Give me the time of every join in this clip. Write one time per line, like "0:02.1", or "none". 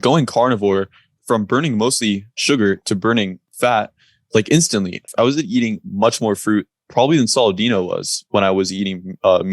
0:01.2
0:02.3
0:03.4
0:05.1